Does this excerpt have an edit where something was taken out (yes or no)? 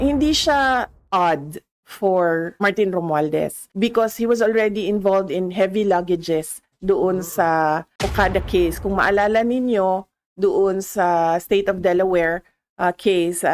yes